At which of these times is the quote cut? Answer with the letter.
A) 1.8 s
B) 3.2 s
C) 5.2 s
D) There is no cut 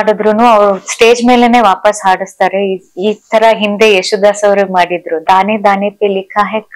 C